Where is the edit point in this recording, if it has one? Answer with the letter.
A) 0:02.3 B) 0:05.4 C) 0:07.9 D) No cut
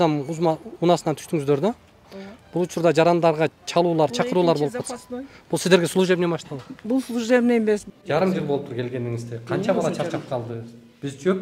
C